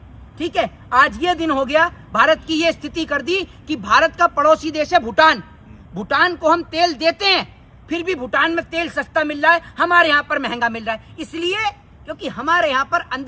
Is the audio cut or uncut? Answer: uncut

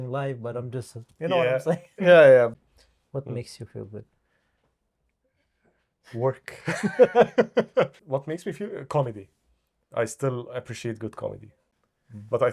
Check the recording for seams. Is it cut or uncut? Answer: cut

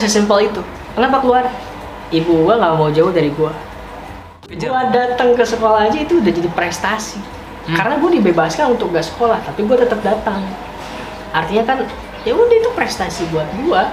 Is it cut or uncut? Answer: cut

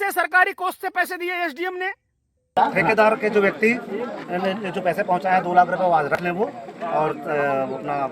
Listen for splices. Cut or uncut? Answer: cut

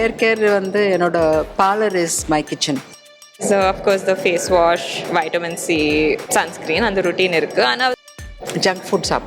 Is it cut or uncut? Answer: cut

